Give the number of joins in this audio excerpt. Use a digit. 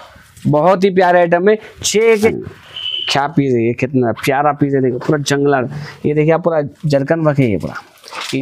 1